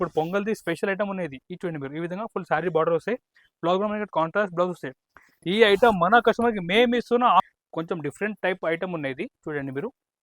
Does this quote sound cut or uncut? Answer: cut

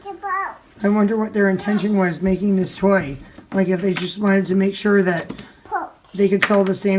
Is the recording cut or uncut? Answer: uncut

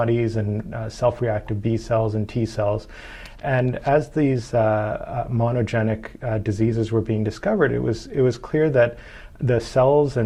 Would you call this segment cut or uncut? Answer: uncut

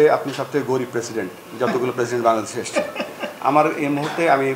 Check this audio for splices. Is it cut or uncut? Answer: uncut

